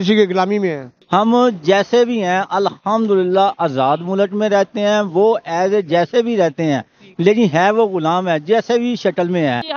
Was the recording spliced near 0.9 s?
yes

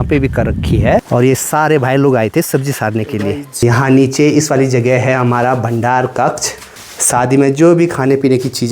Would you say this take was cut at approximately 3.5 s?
yes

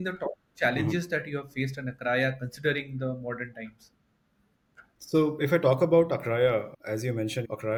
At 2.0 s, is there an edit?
no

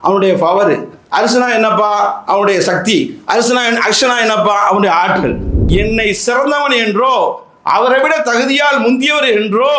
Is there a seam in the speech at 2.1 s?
no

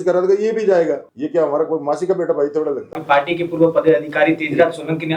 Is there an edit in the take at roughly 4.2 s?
no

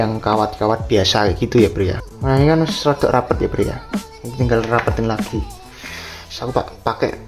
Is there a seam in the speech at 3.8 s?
no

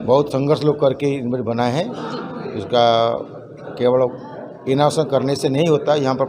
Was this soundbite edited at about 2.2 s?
no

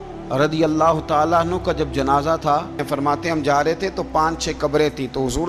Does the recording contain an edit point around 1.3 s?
no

